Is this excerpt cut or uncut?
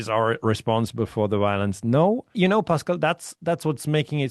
cut